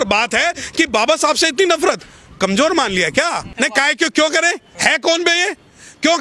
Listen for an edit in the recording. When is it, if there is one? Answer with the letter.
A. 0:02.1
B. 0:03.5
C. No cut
B